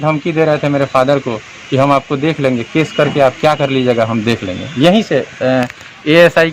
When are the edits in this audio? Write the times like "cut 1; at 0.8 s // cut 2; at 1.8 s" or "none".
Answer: none